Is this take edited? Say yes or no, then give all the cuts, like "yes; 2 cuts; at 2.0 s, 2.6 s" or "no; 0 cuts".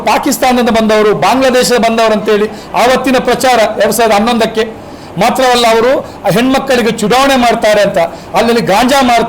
no; 0 cuts